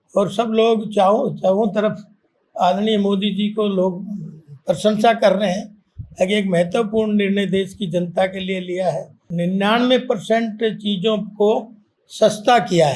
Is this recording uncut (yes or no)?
no